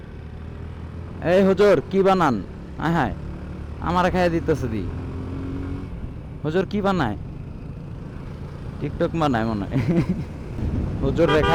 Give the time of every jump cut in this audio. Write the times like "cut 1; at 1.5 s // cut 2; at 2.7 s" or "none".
none